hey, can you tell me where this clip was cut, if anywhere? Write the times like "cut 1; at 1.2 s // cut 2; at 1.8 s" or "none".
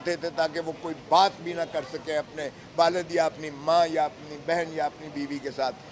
none